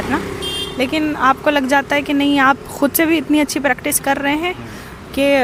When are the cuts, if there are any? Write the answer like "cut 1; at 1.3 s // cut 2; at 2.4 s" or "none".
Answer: none